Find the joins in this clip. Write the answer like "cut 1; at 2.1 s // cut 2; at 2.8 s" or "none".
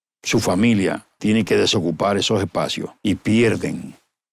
cut 1; at 1.1 s // cut 2; at 2.9 s